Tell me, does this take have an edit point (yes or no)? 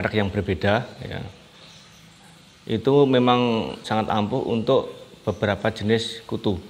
yes